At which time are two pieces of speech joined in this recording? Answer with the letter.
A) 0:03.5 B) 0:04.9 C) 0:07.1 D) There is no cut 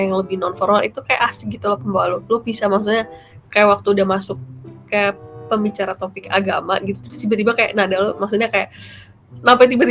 D